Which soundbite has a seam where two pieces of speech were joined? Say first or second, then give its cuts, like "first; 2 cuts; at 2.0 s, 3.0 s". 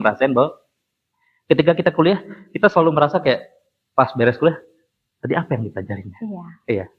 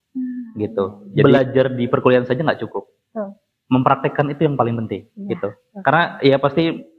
second; 1 cut; at 1.2 s